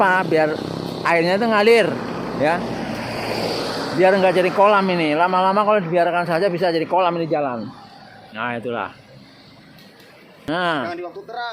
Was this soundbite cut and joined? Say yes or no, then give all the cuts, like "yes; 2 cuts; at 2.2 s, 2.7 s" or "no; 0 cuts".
yes; 1 cut; at 10.5 s